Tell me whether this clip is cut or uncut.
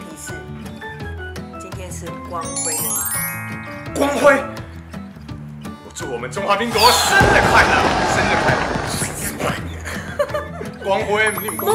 uncut